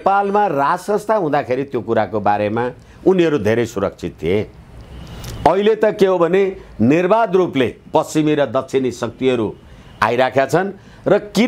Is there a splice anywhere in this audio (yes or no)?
no